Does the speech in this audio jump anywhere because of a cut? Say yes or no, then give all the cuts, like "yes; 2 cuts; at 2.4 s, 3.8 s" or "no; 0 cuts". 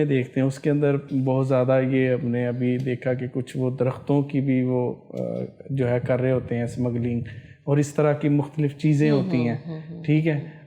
no; 0 cuts